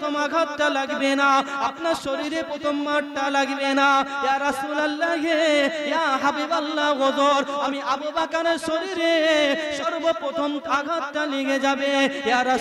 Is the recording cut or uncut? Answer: uncut